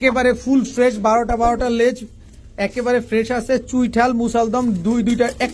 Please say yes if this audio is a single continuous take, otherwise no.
yes